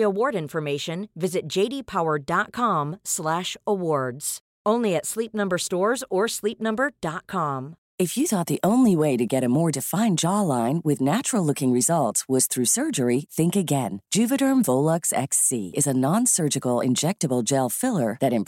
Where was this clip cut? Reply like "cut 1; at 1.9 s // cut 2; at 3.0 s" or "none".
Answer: cut 1; at 7.8 s